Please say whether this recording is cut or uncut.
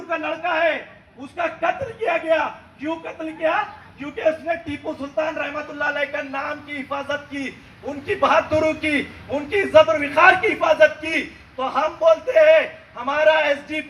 uncut